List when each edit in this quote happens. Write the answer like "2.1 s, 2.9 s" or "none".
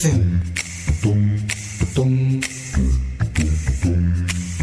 none